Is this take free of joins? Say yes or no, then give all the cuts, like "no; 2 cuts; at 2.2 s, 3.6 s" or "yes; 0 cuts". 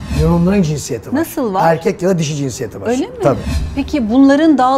no; 1 cut; at 3.6 s